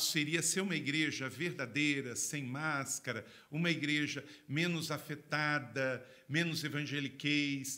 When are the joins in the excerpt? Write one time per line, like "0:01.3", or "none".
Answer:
none